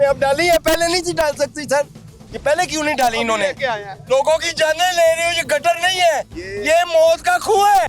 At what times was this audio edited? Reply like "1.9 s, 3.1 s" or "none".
3.9 s